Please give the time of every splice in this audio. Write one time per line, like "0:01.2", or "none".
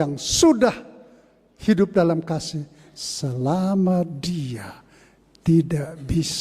none